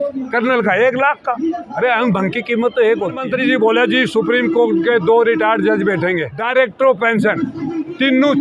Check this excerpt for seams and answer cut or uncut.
cut